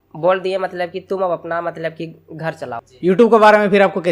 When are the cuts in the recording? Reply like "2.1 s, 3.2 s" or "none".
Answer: 2.8 s